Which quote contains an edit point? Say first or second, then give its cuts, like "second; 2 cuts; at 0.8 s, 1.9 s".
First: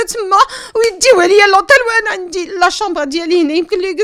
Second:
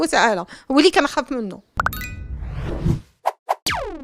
second; 1 cut; at 1.6 s